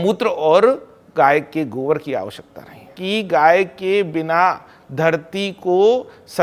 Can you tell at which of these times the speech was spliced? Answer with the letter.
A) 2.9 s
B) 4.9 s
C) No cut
A